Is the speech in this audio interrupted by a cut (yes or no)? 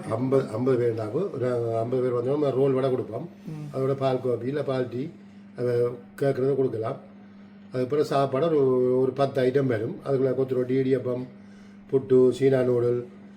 no